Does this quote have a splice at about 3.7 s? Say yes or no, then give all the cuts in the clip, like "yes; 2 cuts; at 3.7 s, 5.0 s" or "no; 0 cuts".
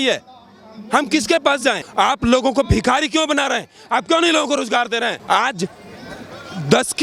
no; 2 cuts; at 1.7 s, 5.2 s